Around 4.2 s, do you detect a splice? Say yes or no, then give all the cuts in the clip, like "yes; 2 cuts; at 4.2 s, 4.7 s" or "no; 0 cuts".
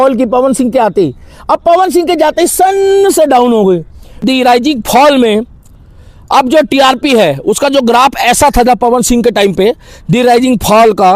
yes; 1 cut; at 4.2 s